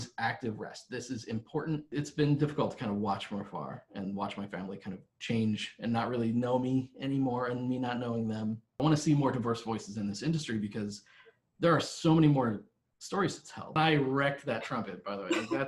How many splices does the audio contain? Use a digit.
3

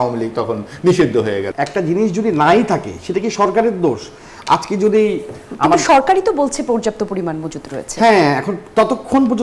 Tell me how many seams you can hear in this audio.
1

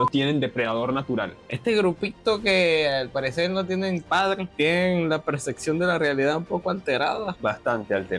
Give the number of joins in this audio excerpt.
3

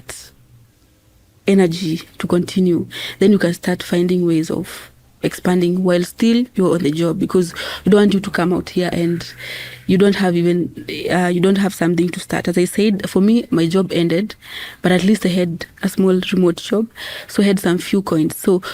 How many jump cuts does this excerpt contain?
1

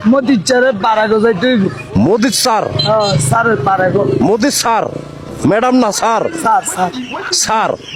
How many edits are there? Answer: 0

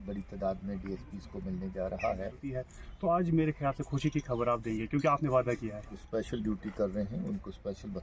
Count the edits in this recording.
2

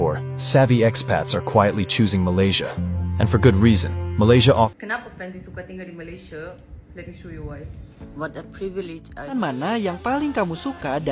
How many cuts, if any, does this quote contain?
2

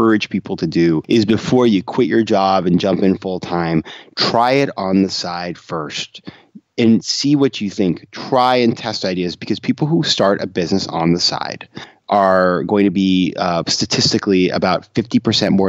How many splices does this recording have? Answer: 2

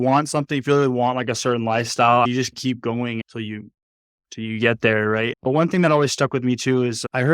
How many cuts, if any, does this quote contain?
0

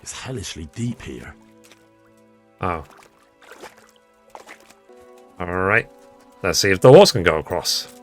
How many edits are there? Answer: 1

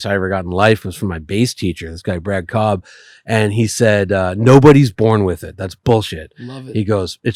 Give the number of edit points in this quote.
0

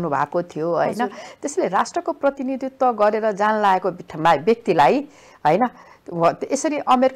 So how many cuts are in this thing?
0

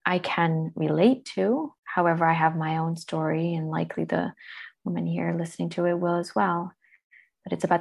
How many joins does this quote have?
1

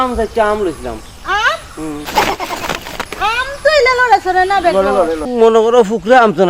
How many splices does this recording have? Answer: 1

